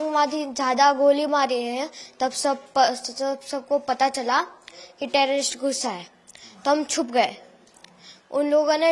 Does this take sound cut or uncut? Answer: uncut